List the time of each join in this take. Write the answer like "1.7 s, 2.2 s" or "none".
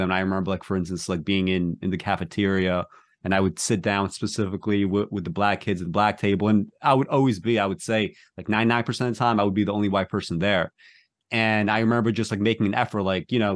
none

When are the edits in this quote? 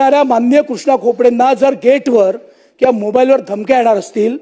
none

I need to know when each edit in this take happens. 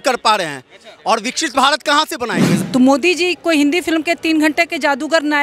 2.5 s

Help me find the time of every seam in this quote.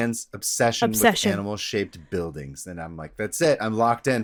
none

